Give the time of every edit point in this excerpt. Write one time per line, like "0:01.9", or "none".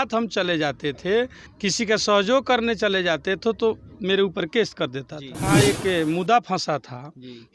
0:01.4
0:05.5